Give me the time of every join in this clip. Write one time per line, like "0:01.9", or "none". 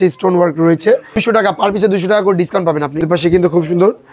0:01.1
0:02.9